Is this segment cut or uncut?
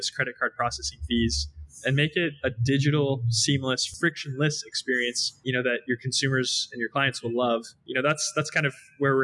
cut